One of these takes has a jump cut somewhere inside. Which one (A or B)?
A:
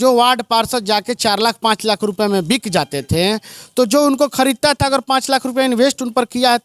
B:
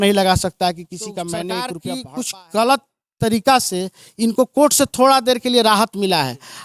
B